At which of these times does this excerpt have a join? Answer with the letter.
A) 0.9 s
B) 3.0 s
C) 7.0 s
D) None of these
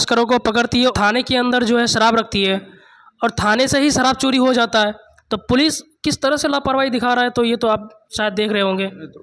A